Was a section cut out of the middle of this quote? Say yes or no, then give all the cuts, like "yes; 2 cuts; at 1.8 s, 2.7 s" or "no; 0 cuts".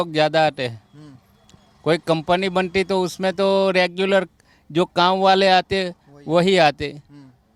no; 0 cuts